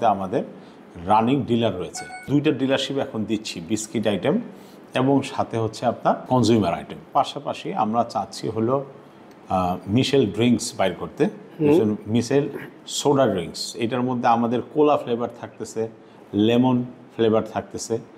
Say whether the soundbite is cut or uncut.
cut